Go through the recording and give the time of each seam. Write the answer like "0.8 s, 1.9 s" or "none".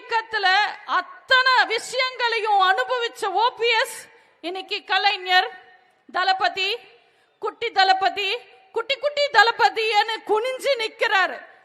none